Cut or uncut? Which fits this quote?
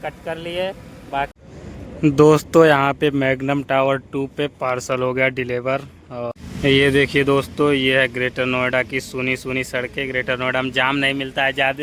cut